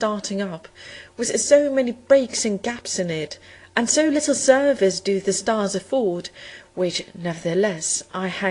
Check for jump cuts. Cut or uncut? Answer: cut